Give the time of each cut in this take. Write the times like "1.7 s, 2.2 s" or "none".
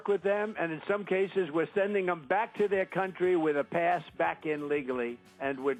none